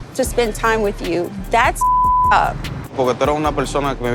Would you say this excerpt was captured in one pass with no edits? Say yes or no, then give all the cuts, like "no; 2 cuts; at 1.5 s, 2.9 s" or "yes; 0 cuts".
no; 1 cut; at 2.9 s